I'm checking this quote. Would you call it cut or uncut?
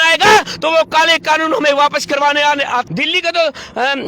cut